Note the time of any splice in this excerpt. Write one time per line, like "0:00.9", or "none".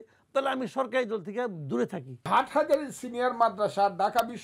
0:02.3